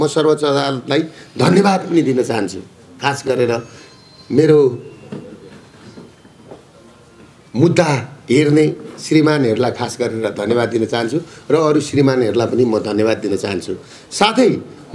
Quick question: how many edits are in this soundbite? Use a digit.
0